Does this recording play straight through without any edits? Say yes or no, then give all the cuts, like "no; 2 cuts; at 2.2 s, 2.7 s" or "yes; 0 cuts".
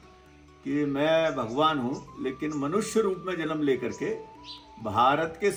yes; 0 cuts